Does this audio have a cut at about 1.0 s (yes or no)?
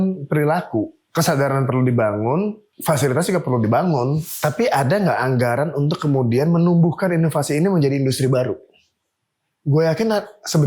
yes